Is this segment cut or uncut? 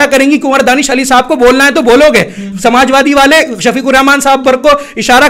uncut